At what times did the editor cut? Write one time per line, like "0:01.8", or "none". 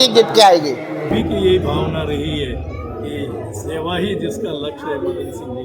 0:01.1